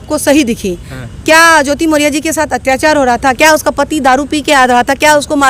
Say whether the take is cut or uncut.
uncut